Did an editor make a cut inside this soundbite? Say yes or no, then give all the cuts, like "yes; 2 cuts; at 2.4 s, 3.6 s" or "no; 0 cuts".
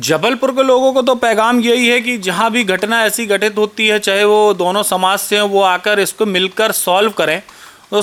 no; 0 cuts